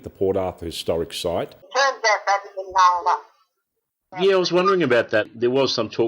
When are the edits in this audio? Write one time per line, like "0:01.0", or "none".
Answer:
0:01.6